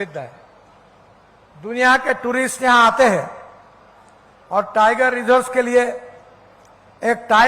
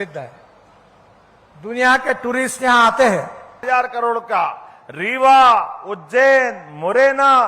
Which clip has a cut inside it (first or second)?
second